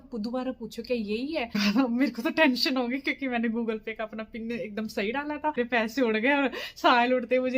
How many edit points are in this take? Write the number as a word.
two